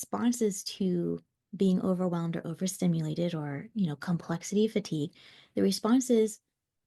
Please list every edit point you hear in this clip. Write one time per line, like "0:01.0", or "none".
none